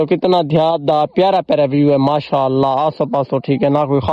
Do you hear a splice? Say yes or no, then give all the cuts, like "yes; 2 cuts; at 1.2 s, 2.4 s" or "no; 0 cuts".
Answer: no; 0 cuts